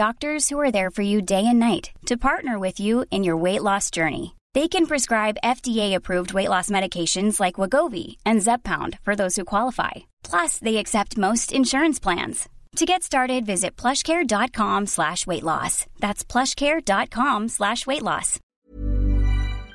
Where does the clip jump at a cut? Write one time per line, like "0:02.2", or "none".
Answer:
0:18.4